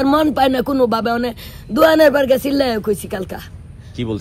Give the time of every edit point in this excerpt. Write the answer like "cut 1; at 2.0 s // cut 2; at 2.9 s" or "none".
none